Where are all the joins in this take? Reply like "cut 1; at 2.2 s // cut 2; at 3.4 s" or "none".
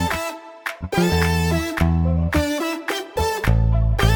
none